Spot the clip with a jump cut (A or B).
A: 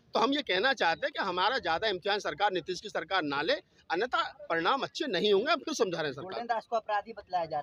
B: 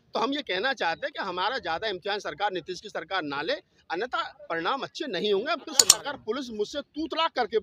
B